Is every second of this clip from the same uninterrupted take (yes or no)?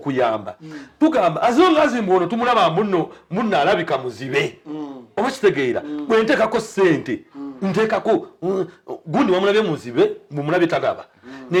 yes